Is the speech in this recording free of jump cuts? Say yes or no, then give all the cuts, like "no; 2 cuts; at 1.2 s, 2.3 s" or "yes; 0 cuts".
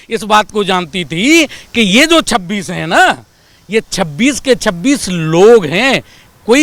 yes; 0 cuts